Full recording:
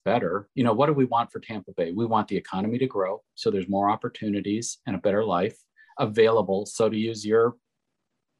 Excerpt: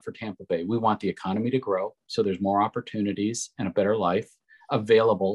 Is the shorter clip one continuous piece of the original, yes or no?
yes